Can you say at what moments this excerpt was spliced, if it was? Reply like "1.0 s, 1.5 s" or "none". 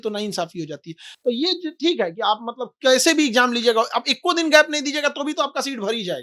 none